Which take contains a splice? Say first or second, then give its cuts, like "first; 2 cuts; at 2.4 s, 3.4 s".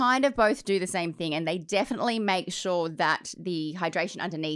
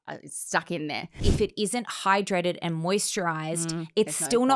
second; 1 cut; at 1.3 s